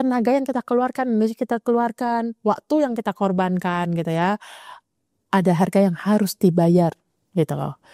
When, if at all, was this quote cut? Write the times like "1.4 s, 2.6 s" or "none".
none